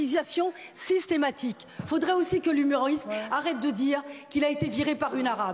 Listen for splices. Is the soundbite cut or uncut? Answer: cut